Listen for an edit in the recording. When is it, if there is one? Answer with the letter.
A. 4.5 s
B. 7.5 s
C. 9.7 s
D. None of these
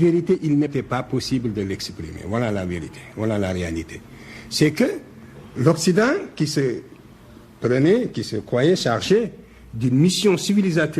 D